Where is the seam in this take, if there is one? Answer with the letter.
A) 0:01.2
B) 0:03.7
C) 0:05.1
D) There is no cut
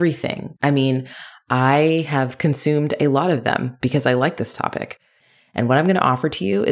C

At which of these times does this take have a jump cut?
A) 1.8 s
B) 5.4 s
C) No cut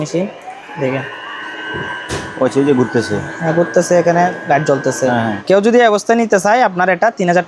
B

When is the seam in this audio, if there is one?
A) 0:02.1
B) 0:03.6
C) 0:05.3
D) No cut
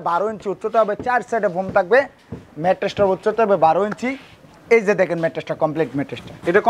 D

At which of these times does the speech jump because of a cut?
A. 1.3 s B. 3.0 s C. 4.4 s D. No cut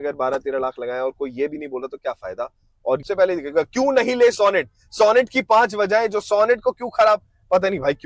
B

